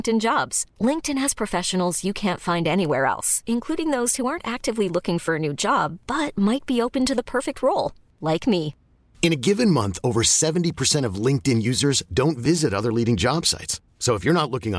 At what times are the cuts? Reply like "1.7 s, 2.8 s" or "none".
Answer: none